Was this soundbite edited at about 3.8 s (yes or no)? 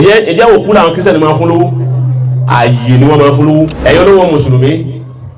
yes